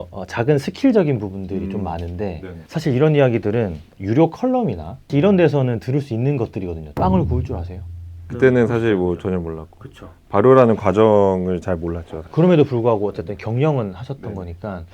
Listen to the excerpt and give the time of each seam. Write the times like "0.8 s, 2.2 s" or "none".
6.8 s, 8.2 s

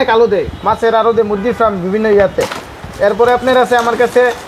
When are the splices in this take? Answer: none

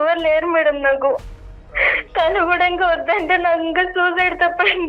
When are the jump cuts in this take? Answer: 1.3 s

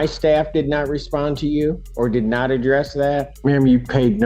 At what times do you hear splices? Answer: 1.9 s, 3.3 s

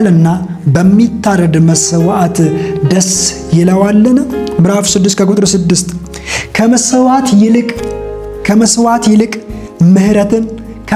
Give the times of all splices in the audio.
4.4 s

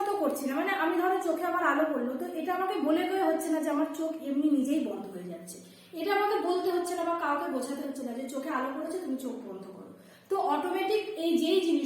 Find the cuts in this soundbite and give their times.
none

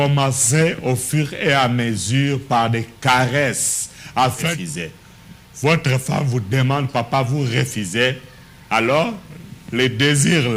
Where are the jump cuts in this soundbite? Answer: 4.5 s

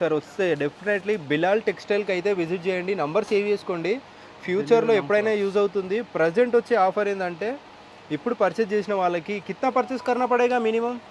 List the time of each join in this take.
none

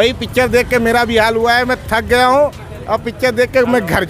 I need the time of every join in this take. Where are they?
none

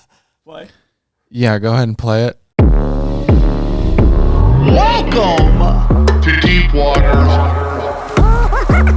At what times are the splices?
2.4 s

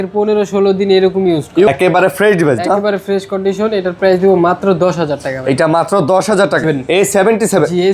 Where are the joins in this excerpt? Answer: 1.7 s, 6.6 s

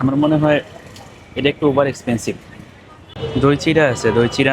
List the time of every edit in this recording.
3.1 s

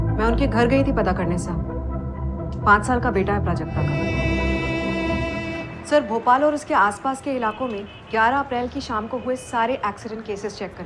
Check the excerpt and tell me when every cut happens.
4.0 s

